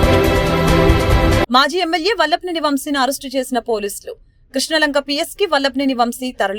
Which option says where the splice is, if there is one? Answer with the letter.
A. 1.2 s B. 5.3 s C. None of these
A